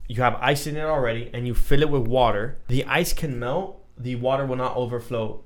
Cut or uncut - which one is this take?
cut